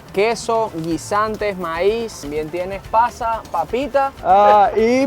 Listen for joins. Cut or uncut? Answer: cut